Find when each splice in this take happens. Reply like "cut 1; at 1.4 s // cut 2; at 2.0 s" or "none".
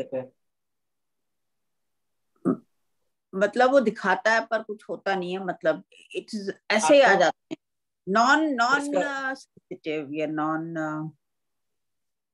none